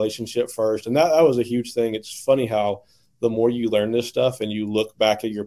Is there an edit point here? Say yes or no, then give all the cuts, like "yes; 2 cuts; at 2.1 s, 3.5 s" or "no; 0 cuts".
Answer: no; 0 cuts